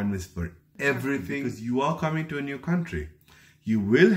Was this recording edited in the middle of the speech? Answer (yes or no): yes